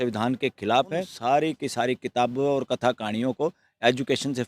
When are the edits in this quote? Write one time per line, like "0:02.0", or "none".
0:01.1